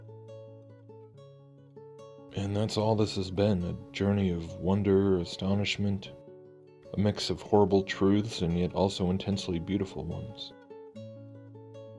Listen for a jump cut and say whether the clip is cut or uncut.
cut